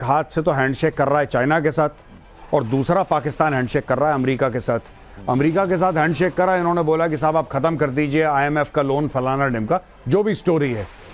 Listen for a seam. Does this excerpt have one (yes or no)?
no